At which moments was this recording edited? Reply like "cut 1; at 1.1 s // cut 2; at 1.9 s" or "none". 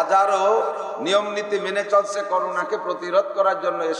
none